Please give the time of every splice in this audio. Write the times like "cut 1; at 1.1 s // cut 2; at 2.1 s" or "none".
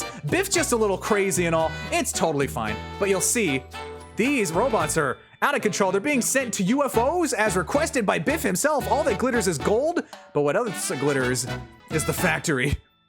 cut 1; at 11.7 s